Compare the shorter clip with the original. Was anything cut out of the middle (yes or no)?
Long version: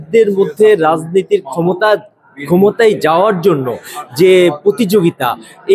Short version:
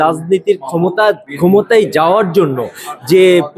yes